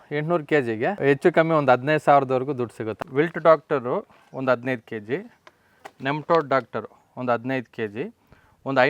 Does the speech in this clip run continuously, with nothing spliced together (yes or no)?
no